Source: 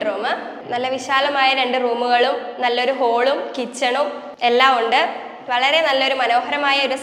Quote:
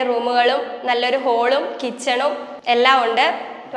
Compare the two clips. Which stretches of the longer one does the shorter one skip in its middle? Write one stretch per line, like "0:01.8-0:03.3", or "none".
none